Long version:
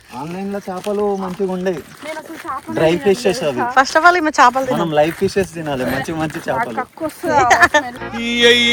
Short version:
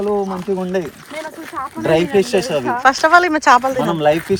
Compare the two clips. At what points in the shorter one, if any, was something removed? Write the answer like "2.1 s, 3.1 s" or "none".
none